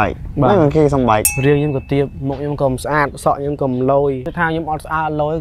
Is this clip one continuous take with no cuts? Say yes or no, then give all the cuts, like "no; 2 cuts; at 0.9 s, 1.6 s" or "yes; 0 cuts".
no; 2 cuts; at 1.3 s, 4.3 s